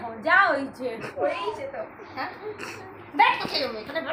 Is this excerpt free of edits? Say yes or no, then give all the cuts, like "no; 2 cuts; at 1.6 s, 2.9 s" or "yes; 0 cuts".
yes; 0 cuts